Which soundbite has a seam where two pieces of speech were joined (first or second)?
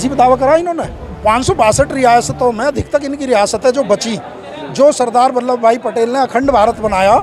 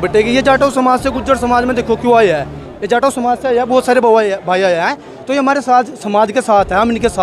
first